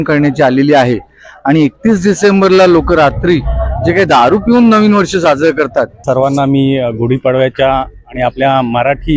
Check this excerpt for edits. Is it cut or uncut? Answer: cut